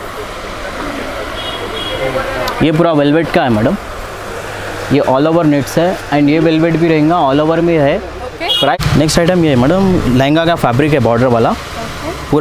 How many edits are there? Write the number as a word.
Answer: one